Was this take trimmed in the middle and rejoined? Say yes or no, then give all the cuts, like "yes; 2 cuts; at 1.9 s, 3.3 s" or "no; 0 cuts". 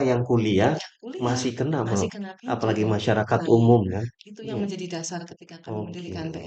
no; 0 cuts